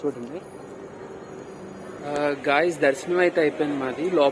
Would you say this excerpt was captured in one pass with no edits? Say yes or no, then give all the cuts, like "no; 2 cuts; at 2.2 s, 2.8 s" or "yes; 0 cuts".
no; 1 cut; at 2.0 s